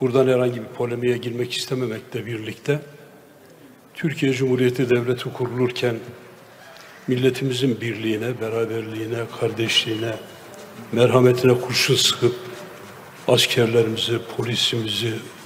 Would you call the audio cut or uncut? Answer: uncut